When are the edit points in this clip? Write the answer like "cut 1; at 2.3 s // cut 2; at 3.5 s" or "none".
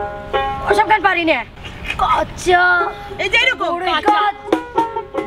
cut 1; at 1.6 s